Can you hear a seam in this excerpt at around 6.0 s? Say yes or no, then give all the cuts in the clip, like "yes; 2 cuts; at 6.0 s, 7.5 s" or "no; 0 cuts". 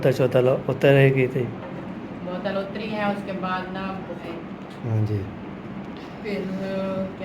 no; 1 cut; at 4.2 s